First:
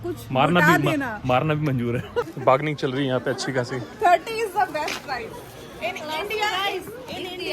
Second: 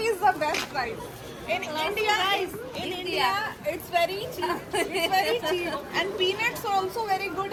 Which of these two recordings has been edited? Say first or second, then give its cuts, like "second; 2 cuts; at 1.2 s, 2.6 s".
first; 1 cut; at 2.3 s